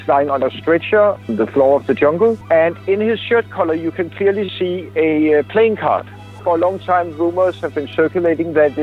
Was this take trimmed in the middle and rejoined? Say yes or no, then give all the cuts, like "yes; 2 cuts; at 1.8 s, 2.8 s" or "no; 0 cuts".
yes; 3 cuts; at 1.2 s, 2.4 s, 6.3 s